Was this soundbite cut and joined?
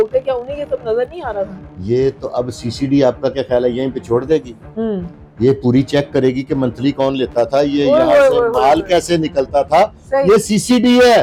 no; 0 cuts

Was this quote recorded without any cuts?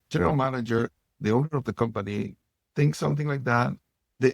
yes; 0 cuts

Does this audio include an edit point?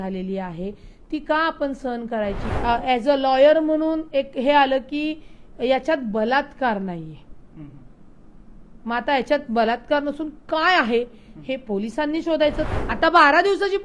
yes; 2 cuts; at 2.5 s, 12.7 s

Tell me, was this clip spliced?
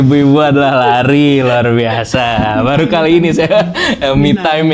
no; 0 cuts

